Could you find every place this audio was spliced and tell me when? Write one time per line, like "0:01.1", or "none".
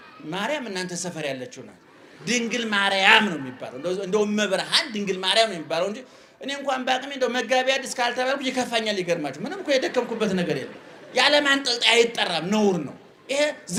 none